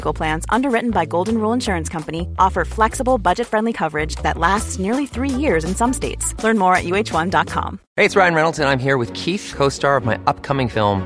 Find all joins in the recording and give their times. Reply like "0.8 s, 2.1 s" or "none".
7.8 s

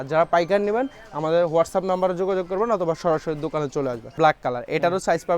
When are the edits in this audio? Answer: 4.2 s

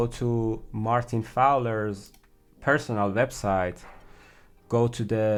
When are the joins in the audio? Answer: none

